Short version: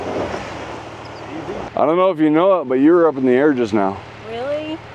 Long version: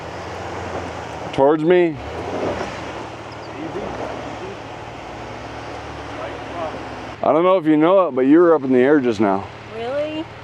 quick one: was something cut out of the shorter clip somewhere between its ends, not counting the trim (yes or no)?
yes